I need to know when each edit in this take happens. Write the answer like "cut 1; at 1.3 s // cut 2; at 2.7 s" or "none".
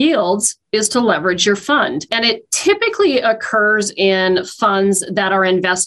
cut 1; at 2.1 s